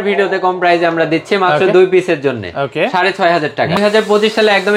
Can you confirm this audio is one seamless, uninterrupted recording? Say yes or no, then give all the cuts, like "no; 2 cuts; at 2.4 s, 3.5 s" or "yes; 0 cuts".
no; 1 cut; at 3.8 s